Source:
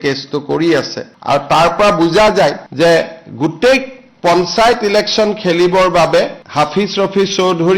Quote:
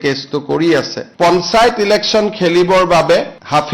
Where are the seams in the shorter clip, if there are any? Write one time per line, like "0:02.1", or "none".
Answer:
0:01.0